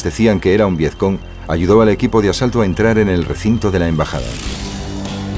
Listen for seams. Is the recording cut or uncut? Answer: uncut